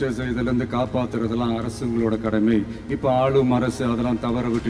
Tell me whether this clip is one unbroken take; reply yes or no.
yes